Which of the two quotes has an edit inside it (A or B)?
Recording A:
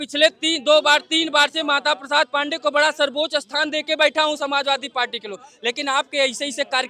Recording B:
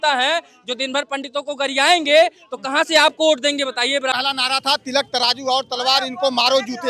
B